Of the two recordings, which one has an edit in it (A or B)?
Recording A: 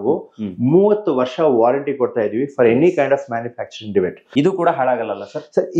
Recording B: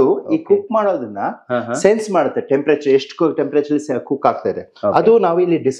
A